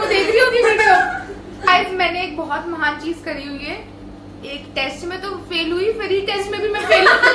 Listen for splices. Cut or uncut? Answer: cut